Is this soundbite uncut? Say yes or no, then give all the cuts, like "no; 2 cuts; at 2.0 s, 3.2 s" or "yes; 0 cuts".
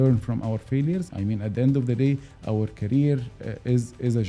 no; 1 cut; at 1.1 s